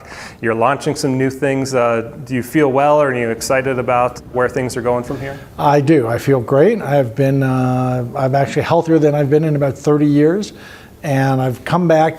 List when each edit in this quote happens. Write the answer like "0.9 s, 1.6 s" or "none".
4.4 s

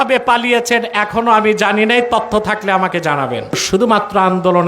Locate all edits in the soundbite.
3.6 s

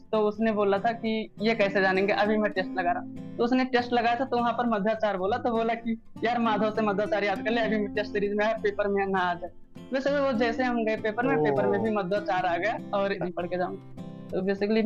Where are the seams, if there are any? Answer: 13.2 s

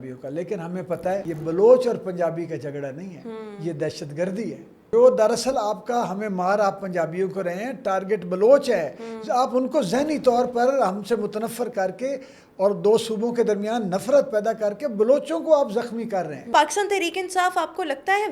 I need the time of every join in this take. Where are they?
1.2 s, 4.9 s, 16.5 s

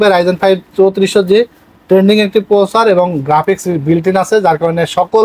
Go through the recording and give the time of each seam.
none

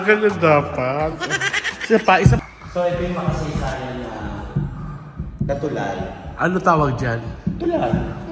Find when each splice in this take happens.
2.4 s

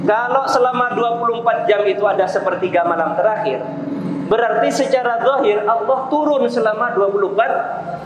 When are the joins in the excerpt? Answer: none

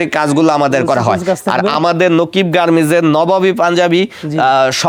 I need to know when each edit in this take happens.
none

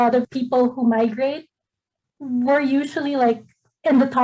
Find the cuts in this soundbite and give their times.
none

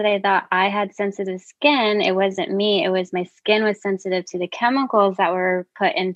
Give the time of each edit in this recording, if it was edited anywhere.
none

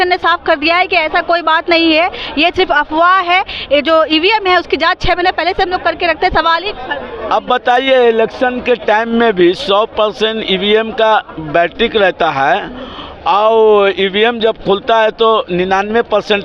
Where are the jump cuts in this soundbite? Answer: none

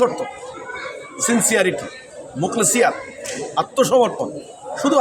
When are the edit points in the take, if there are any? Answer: none

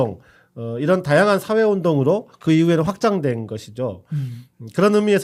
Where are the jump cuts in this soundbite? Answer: none

